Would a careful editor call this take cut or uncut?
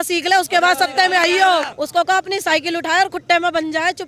cut